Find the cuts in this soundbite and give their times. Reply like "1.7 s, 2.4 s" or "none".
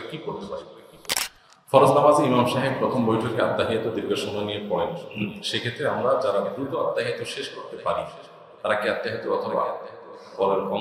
1.2 s